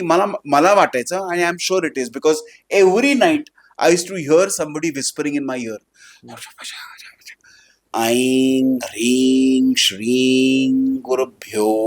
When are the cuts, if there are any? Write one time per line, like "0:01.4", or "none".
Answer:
0:07.9